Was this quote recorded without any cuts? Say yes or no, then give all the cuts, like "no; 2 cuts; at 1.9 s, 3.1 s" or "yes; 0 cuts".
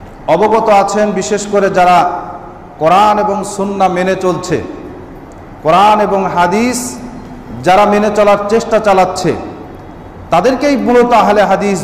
yes; 0 cuts